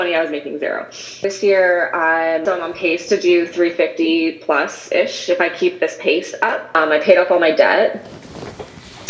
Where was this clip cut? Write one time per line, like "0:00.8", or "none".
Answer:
0:01.2
0:02.4
0:06.8